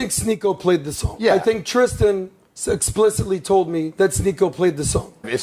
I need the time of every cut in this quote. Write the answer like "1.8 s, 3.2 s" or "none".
1.0 s, 3.9 s